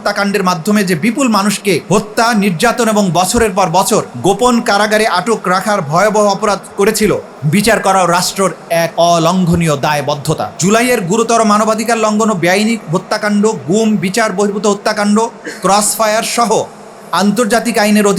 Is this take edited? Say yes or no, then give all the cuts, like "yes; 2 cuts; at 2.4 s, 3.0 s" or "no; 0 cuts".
yes; 5 cuts; at 1.8 s, 4.1 s, 7.3 s, 8.9 s, 10.6 s